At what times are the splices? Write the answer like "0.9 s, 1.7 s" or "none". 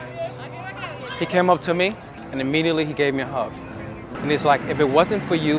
4.1 s